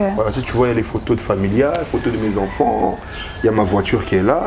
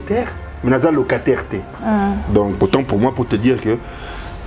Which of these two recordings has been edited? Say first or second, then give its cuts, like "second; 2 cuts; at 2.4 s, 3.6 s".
second; 1 cut; at 2.5 s